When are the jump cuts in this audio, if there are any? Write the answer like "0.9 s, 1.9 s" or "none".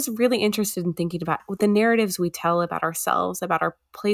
1.5 s